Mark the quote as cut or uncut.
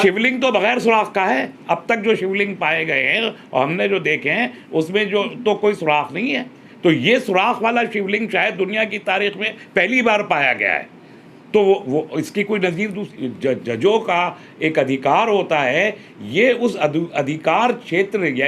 cut